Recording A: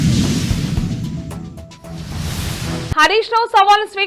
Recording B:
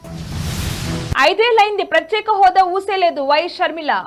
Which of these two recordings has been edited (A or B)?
B